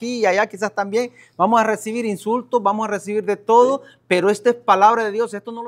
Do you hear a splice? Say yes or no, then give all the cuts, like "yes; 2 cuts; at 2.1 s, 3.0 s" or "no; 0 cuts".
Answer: no; 0 cuts